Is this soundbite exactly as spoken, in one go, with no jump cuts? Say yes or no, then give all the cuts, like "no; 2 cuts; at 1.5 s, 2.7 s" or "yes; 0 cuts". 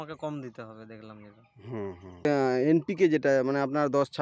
no; 1 cut; at 2.3 s